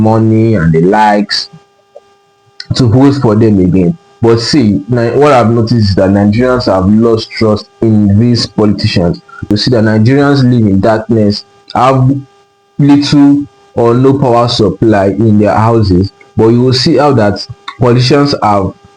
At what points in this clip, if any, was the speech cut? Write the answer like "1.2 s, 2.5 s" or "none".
9.5 s